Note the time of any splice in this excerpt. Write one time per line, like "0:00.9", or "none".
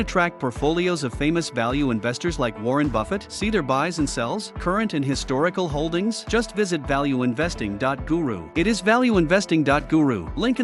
none